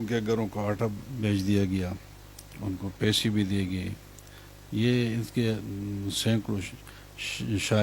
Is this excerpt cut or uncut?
uncut